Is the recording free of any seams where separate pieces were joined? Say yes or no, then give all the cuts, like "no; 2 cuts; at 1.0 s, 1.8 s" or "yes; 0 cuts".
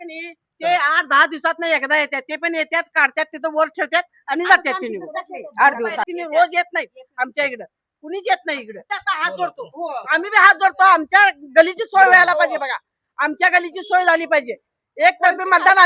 no; 2 cuts; at 6.1 s, 8.8 s